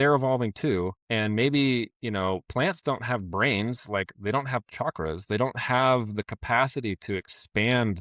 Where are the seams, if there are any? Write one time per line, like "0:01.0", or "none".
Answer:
0:01.0